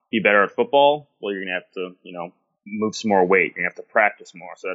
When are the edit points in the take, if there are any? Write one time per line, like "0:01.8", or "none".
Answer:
none